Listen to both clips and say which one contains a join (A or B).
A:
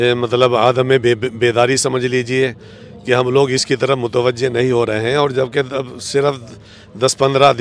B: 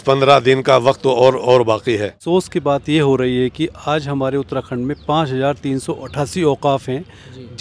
B